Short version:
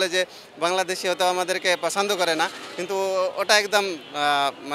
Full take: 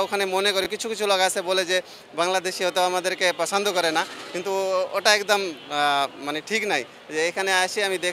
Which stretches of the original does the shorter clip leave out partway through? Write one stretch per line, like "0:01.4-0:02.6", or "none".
none

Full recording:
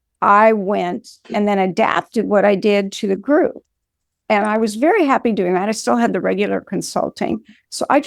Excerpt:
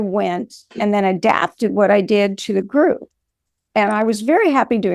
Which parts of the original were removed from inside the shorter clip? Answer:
none

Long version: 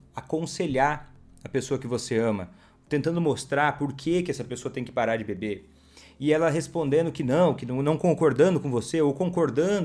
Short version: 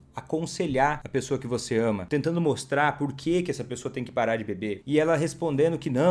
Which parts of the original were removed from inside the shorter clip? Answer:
0:01.0-0:01.4
0:02.4-0:02.8
0:05.6-0:06.1

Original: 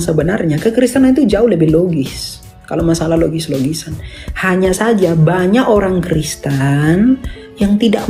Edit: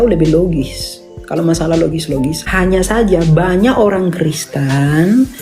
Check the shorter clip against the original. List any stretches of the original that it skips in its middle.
0:03.8-0:04.3

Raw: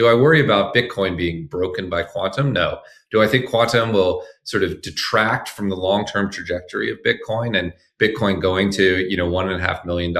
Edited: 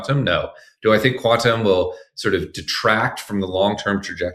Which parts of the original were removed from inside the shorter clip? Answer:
none

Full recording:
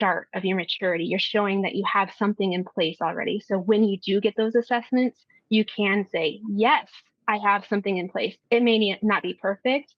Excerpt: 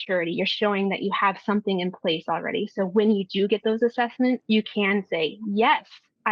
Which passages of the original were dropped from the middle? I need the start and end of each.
0:05.1-0:05.4

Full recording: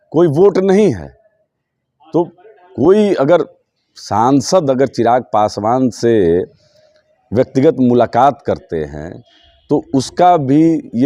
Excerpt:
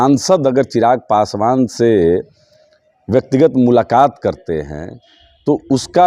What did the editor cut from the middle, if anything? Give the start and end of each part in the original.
none

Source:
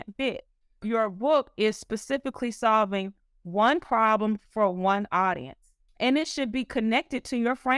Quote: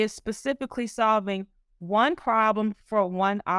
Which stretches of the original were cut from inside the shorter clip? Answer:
none

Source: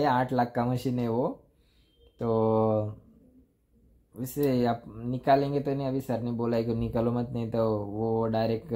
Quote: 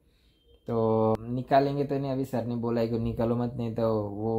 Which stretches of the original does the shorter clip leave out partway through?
0:02.7-0:04.9

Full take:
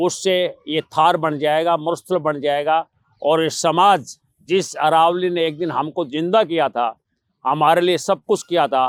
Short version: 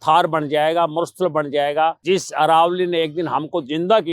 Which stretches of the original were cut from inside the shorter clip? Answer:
0:02.9-0:04.4

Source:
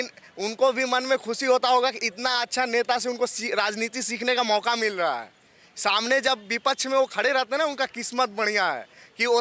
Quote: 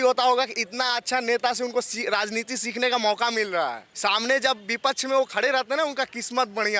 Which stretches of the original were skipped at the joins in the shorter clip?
0:05.3-0:05.7

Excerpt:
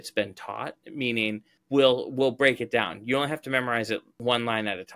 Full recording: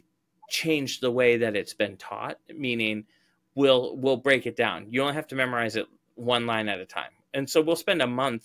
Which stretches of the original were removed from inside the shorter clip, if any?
0:03.1-0:03.4
0:06.0-0:06.1

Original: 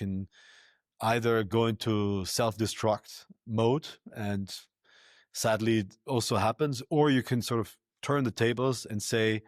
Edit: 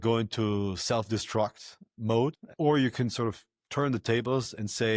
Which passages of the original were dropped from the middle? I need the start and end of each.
0:04.0-0:06.8

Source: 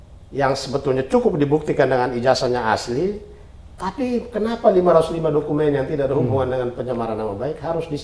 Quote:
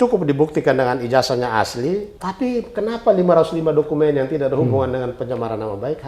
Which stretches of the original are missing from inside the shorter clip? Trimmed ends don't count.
0:03.3-0:03.8

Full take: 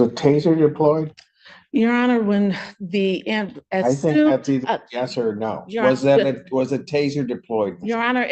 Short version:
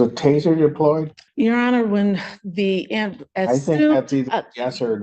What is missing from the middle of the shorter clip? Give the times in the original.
0:01.2-0:01.5

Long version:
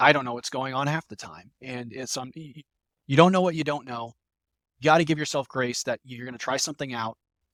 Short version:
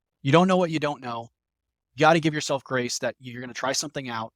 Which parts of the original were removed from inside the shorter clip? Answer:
none

